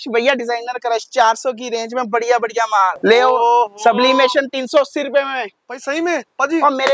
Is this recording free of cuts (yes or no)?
no